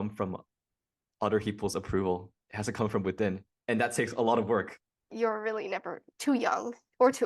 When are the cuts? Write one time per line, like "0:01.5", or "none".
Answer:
0:05.1